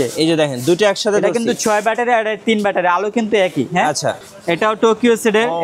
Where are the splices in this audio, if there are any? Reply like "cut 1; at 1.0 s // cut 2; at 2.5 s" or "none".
cut 1; at 4.2 s